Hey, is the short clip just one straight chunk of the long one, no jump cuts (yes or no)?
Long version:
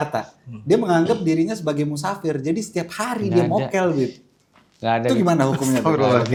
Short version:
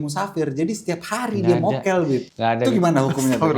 no